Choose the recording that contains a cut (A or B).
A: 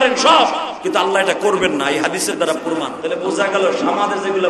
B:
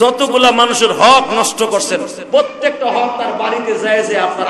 A